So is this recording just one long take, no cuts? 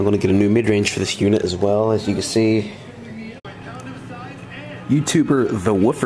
yes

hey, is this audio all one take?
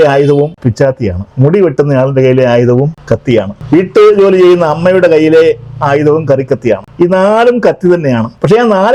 yes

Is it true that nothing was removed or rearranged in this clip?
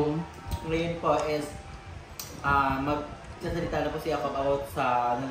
yes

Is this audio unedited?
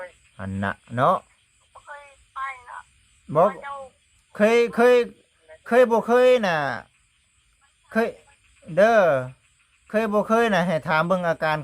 no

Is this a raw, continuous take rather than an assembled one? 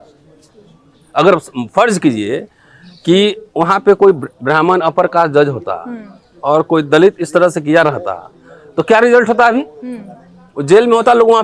yes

